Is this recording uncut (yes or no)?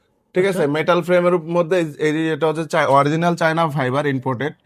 yes